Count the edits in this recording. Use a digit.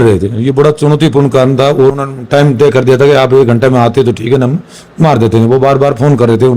1